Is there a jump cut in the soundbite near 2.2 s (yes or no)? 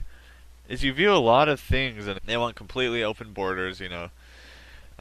no